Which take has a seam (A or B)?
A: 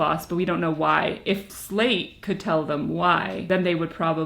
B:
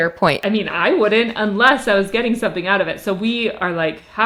A